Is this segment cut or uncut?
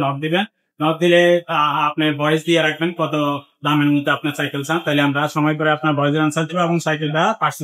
uncut